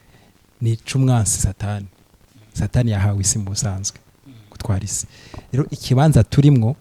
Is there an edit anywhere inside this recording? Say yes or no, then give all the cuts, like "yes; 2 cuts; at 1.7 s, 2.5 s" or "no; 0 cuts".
no; 0 cuts